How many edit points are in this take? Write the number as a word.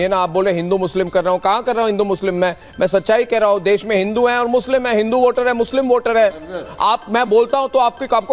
zero